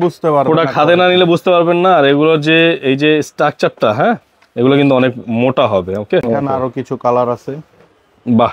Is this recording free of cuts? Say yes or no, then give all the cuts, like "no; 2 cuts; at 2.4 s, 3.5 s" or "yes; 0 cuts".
no; 1 cut; at 6.3 s